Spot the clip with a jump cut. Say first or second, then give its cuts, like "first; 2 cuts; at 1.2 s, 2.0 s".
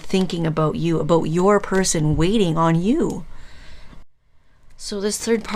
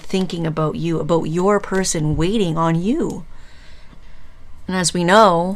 first; 1 cut; at 4.0 s